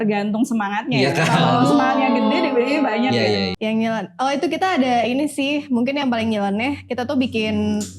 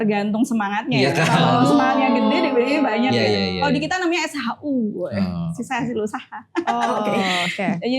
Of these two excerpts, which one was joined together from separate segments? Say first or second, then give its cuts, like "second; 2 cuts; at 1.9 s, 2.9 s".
first; 1 cut; at 3.5 s